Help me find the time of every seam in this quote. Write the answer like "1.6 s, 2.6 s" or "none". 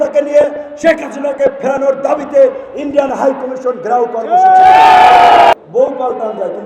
5.5 s